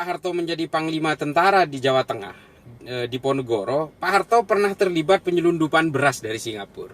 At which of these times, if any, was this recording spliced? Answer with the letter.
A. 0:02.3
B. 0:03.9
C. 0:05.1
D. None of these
D